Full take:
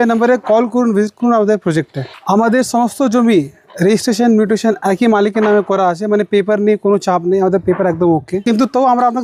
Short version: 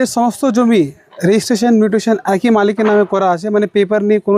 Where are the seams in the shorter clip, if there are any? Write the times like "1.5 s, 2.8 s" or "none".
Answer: none